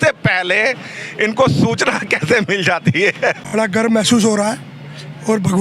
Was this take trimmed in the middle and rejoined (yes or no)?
yes